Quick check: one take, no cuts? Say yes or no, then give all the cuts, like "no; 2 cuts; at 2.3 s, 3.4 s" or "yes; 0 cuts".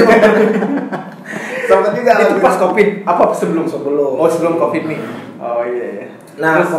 yes; 0 cuts